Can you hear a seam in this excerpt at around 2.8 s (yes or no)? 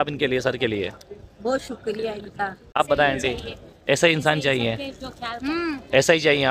yes